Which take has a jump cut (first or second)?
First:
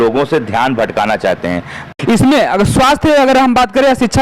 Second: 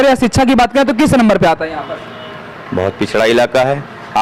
first